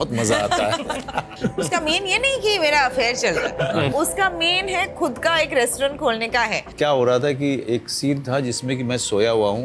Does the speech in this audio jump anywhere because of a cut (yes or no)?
yes